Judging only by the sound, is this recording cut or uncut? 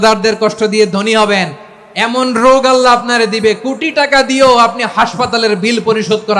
uncut